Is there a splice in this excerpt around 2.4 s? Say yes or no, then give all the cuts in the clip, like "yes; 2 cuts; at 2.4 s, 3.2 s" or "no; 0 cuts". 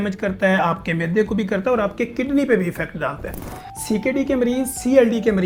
no; 0 cuts